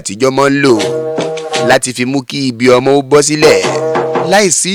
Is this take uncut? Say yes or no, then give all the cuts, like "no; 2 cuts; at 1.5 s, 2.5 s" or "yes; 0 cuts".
yes; 0 cuts